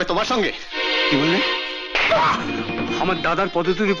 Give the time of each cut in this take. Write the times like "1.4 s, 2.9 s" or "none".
2.9 s